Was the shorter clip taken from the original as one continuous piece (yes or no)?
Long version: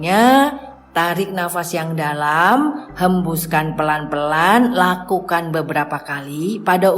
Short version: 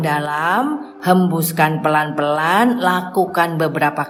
yes